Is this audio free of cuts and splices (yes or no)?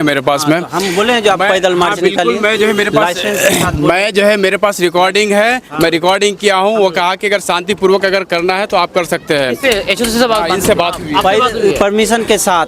yes